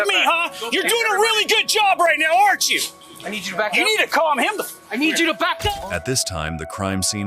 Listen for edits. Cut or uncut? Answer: uncut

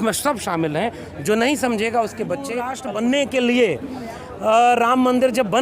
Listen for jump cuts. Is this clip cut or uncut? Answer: cut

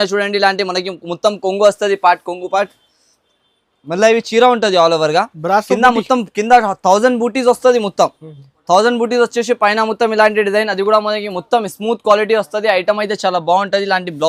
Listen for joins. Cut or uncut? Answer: uncut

